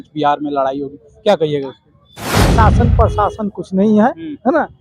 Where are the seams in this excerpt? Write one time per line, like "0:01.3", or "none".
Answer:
0:02.5